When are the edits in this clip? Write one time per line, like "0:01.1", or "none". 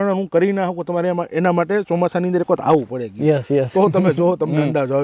none